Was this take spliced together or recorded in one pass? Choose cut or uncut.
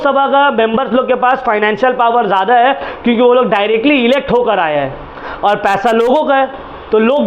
uncut